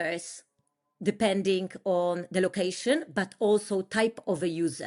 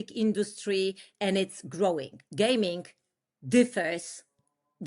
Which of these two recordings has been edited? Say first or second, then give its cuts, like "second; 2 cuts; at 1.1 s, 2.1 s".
second; 1 cut; at 2.2 s